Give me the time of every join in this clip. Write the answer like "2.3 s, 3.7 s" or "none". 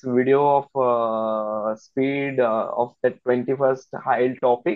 none